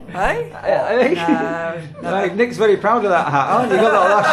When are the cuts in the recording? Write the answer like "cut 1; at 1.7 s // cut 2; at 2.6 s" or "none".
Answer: none